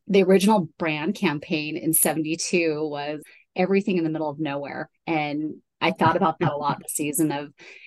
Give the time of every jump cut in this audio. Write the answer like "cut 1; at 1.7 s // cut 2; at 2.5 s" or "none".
none